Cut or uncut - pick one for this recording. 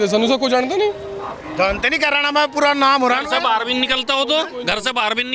uncut